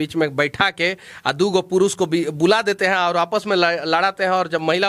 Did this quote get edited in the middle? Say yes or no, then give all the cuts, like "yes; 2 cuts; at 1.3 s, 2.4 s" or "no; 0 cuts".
no; 0 cuts